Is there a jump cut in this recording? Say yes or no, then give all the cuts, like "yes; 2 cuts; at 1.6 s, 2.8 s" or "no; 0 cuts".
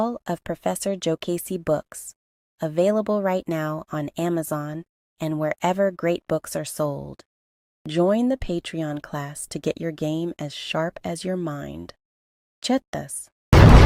no; 0 cuts